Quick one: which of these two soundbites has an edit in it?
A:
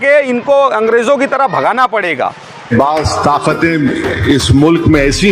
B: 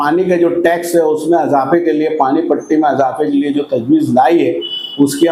A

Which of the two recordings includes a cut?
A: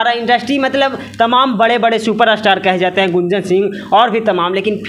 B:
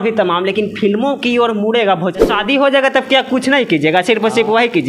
B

